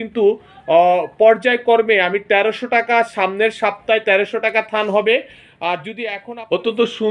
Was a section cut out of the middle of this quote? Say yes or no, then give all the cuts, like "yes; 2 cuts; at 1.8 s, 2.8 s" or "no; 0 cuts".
yes; 1 cut; at 5.9 s